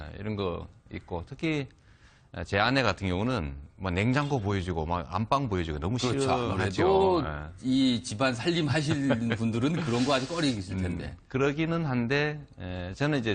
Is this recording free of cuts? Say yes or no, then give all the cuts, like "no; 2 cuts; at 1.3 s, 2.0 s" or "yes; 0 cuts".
yes; 0 cuts